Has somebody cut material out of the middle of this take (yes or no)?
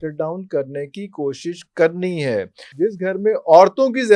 yes